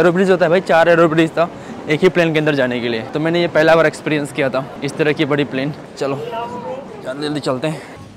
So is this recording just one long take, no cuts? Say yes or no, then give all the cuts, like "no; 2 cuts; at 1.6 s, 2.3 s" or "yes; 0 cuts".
yes; 0 cuts